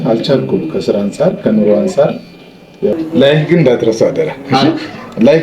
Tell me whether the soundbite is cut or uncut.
cut